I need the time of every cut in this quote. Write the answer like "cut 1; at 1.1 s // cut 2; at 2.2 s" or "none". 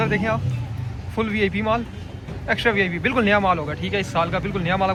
none